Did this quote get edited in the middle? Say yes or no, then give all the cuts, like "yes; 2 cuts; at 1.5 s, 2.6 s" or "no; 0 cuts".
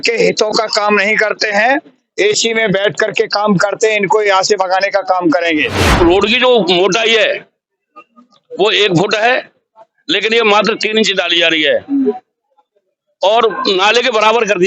yes; 1 cut; at 5.8 s